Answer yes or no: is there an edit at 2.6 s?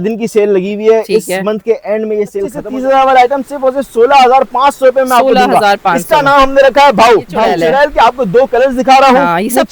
yes